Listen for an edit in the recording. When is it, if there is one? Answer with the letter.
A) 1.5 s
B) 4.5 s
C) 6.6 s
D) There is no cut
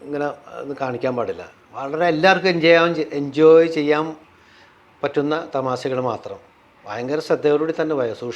D